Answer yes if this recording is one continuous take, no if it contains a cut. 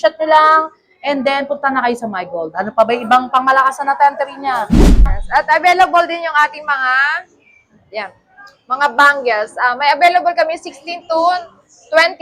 no